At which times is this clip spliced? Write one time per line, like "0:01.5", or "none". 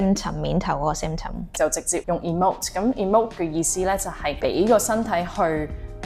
0:01.6